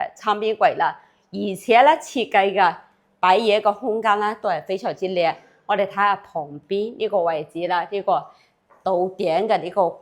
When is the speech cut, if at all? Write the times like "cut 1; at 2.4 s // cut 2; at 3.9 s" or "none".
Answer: none